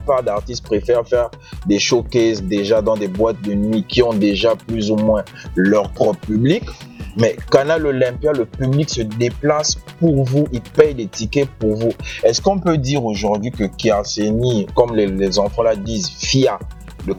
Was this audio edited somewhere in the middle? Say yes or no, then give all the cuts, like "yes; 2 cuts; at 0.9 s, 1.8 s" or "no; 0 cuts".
no; 0 cuts